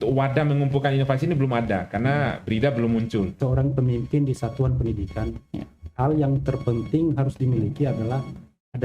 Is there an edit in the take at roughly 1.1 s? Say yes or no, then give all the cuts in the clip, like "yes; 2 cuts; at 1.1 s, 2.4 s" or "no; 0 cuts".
no; 1 cut; at 3.4 s